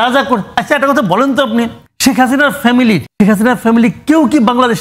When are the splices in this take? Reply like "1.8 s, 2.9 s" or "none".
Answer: 1.8 s, 3.1 s